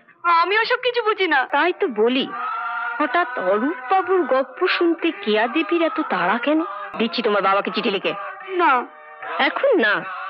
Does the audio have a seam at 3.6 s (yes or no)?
no